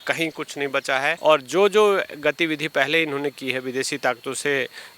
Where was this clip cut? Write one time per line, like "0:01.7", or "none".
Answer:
0:01.2